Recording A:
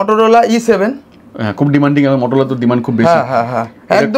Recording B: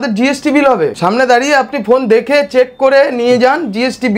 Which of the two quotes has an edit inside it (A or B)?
B